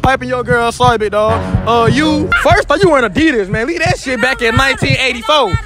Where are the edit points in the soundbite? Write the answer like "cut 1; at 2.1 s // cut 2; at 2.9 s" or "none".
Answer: cut 1; at 2.3 s